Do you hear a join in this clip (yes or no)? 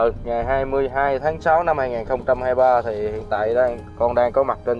no